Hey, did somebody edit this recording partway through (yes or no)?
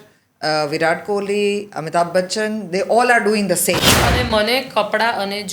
yes